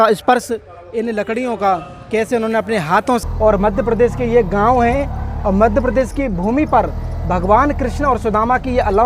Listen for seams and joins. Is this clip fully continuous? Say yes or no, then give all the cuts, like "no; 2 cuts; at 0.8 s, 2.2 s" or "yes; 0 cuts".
no; 1 cut; at 3.2 s